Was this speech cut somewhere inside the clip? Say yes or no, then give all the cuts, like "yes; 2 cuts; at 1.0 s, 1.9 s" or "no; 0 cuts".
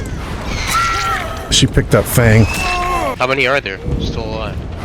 yes; 2 cuts; at 1.5 s, 3.2 s